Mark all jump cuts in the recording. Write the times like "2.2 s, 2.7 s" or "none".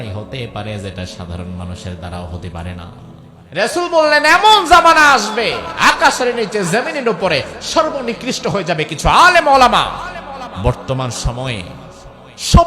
3.4 s, 10.5 s